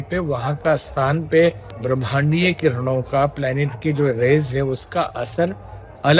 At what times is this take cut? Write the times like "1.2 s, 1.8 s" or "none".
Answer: 1.7 s

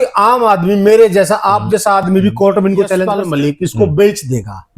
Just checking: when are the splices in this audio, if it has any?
3.1 s

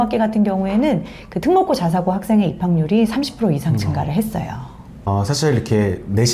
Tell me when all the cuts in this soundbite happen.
5.1 s

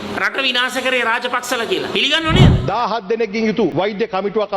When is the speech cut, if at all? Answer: 2.6 s, 3.7 s

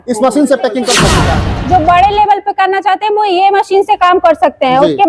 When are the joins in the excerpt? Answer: 1.1 s

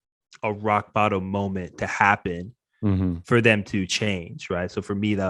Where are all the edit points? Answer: none

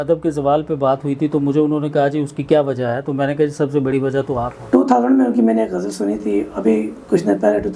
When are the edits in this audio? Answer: 4.5 s

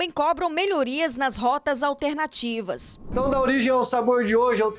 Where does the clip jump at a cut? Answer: 3.1 s

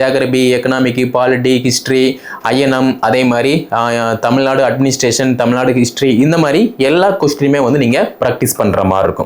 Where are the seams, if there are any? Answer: none

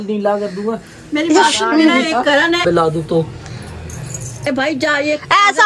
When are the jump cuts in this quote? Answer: 2.6 s

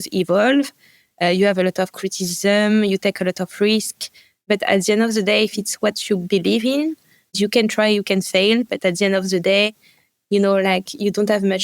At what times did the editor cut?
4.5 s, 7.4 s

